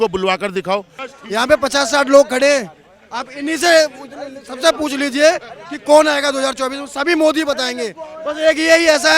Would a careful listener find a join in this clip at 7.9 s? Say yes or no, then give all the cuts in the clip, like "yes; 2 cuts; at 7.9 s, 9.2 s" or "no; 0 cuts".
no; 1 cut; at 1.0 s